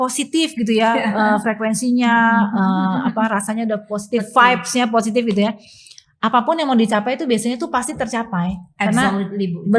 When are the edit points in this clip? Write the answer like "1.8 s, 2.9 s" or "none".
none